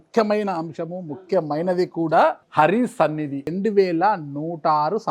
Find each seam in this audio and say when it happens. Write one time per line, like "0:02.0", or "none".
0:02.4
0:03.5